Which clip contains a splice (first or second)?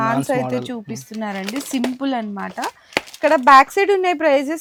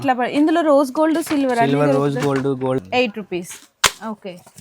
second